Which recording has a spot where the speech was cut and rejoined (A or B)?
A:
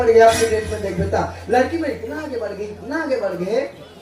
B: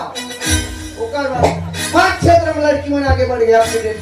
B